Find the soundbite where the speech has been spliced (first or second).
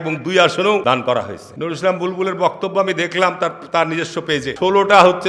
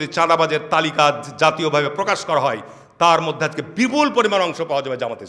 first